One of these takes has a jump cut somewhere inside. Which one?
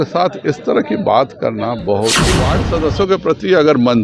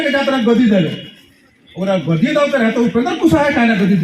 first; 1 cut; at 2.5 s

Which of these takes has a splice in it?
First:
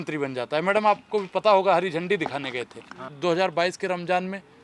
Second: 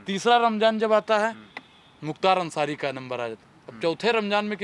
first; 1 cut; at 3.1 s

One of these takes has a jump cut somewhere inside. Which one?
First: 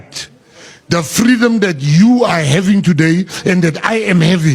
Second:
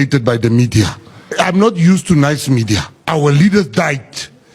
second; 2 cuts; at 1.3 s, 2.9 s

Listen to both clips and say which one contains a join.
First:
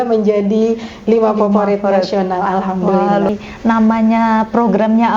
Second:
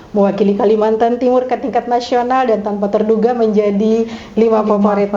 first; 1 cut; at 3.3 s

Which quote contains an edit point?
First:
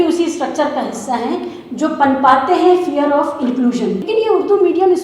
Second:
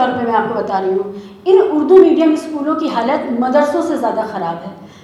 first; 1 cut; at 4.0 s

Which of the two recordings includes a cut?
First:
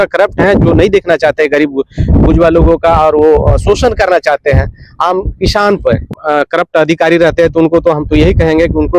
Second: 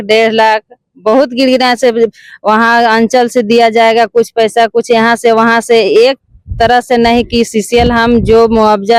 first; 1 cut; at 6.1 s

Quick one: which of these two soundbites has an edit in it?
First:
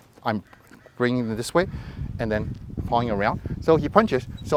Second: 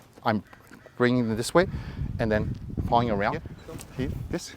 second; 1 cut; at 3.5 s

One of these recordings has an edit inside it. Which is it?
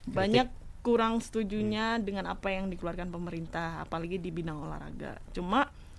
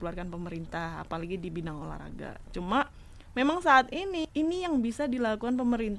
second; 1 cut; at 4.3 s

